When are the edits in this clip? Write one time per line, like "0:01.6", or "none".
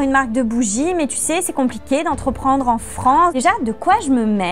0:03.3